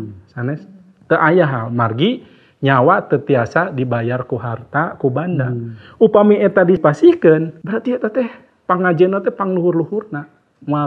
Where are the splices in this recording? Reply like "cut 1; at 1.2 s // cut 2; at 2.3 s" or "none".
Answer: cut 1; at 6.8 s // cut 2; at 7.6 s